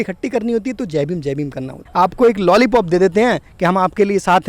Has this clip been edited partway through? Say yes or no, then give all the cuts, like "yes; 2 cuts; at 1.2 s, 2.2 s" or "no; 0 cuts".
yes; 1 cut; at 1.8 s